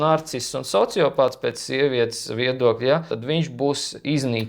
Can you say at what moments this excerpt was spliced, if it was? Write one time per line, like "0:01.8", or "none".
0:03.1